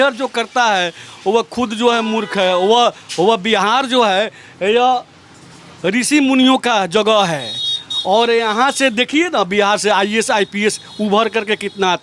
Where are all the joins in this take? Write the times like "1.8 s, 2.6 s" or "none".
none